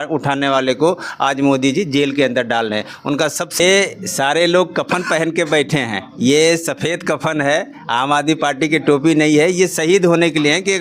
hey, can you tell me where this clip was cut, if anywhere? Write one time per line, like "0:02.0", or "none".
0:03.6